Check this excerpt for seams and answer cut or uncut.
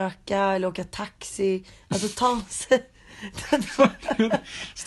uncut